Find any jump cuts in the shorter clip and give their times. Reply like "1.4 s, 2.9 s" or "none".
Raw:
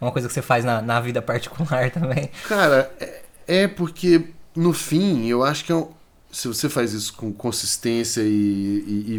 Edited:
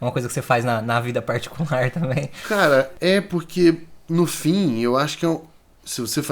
2.9 s

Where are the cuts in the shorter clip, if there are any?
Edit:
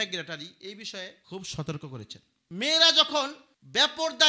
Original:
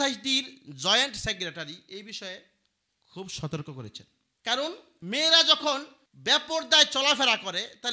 1.2 s, 2.4 s

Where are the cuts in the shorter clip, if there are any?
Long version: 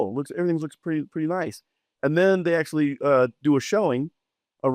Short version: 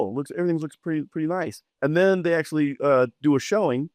1.6 s

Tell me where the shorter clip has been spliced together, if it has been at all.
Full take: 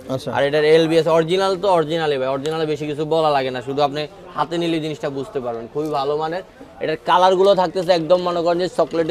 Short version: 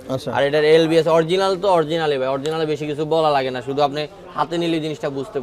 none

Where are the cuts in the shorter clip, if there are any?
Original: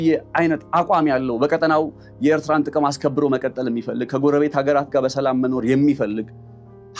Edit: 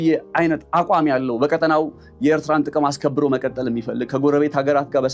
none

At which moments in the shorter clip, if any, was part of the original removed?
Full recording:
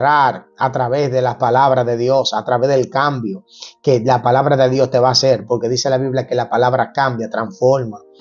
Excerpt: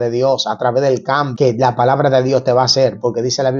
1.3 s

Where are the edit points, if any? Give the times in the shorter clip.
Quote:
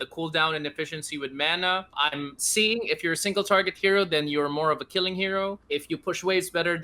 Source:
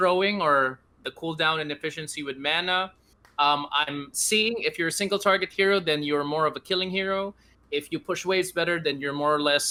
1.9 s, 5.6 s

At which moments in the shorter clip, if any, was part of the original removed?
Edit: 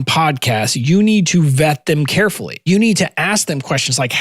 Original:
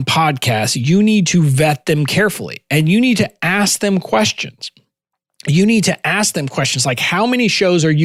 2.5 s

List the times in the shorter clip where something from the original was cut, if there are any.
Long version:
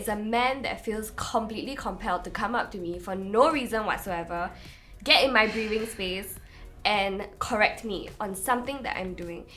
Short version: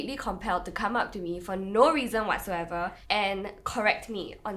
3.0 s

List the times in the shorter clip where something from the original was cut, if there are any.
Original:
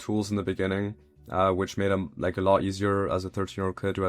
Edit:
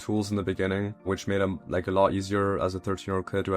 1.1 s

